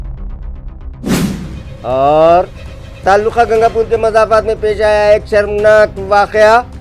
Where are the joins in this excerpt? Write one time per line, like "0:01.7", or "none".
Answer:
none